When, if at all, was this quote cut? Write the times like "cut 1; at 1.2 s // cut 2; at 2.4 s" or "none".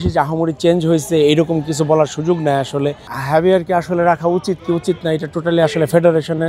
cut 1; at 3.1 s